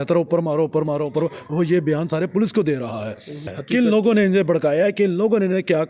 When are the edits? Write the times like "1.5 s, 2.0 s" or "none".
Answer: 3.5 s